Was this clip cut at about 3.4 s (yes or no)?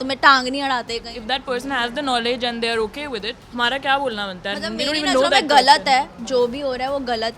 yes